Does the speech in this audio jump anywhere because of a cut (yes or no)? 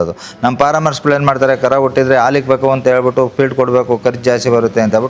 no